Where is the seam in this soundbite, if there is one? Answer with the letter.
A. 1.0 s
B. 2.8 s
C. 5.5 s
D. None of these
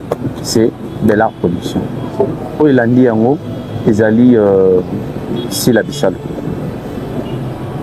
D